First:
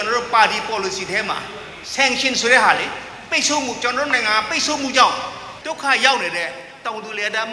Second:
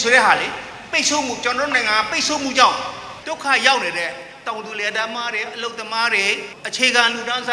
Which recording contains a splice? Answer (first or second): second